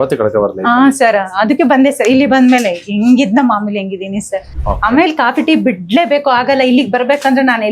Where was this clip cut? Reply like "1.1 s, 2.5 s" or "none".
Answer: 4.5 s